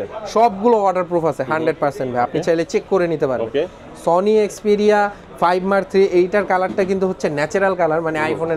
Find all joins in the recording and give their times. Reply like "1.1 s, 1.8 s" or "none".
none